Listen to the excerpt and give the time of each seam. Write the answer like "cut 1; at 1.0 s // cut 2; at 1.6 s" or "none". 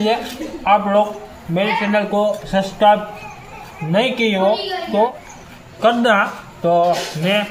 none